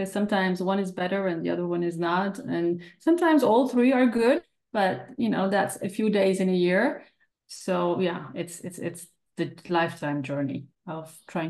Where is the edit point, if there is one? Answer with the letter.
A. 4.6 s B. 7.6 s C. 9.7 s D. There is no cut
A